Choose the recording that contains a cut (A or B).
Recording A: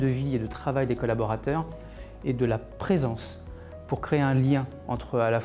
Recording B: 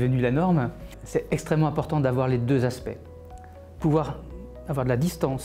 B